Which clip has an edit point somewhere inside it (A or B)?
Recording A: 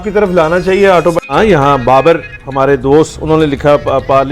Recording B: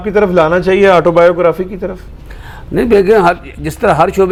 A